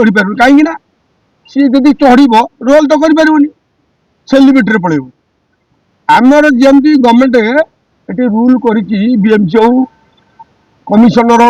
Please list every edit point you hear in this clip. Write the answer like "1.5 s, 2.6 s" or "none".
none